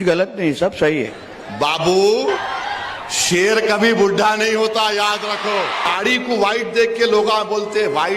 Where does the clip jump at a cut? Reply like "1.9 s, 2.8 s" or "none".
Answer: 1.2 s, 2.5 s, 5.9 s